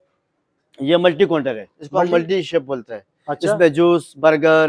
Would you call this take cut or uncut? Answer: uncut